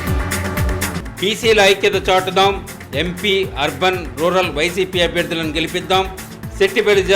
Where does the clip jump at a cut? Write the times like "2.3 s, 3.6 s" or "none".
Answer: 1.0 s